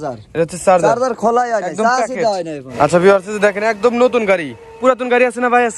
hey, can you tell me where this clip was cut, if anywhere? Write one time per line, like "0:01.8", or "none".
0:02.6